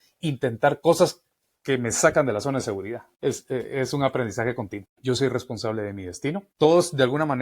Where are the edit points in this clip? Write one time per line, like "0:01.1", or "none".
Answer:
0:03.1
0:04.8
0:06.5